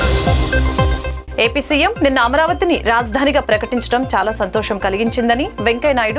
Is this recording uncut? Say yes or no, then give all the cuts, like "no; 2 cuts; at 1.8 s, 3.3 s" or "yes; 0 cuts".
no; 1 cut; at 1.0 s